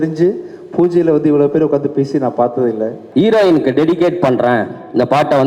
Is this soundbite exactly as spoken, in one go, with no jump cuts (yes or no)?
no